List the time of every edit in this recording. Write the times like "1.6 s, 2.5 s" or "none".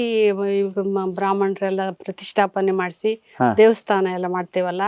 none